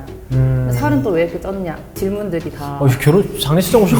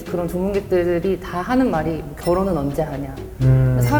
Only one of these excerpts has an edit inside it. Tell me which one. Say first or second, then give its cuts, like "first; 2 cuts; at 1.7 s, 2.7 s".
first; 1 cut; at 1.9 s